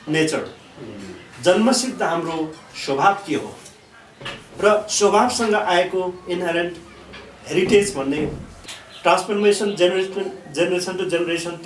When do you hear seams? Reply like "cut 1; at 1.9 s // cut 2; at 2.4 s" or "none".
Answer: cut 1; at 8.5 s